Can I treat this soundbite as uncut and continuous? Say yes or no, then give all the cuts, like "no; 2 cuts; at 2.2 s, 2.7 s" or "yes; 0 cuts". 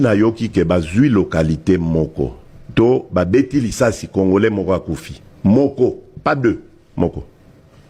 yes; 0 cuts